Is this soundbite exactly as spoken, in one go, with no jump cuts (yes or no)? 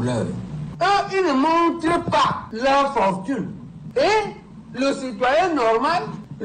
yes